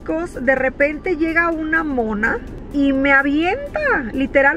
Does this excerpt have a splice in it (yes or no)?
yes